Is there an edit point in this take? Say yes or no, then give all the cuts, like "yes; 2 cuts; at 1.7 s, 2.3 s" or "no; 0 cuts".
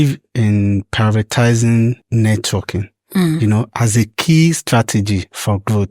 yes; 1 cut; at 2.0 s